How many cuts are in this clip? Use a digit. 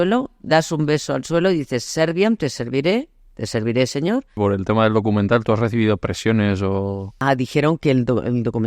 2